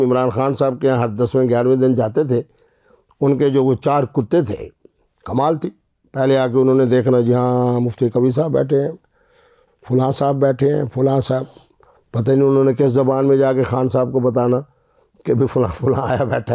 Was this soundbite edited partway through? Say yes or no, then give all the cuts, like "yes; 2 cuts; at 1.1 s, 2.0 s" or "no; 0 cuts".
no; 0 cuts